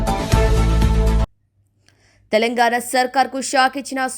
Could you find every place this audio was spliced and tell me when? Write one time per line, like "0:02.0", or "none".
0:01.3